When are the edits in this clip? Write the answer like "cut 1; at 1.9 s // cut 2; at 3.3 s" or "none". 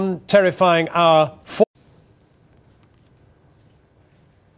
none